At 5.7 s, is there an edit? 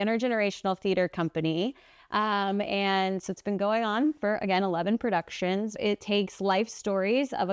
yes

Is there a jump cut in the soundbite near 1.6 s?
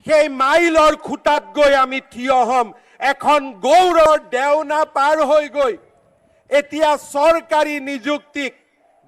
no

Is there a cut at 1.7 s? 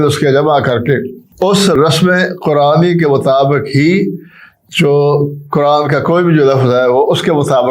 yes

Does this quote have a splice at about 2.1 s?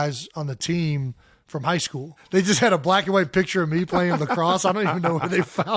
yes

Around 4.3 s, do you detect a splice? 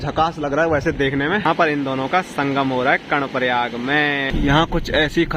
yes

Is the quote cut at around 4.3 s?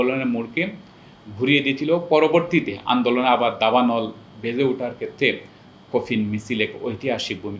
no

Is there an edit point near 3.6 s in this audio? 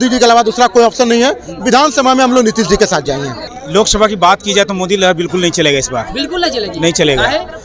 yes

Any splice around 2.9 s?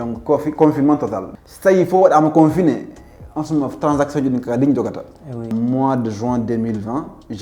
no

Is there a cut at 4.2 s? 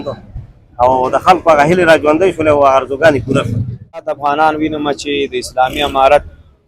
yes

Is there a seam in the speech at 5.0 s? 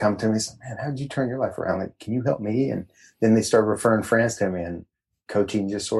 no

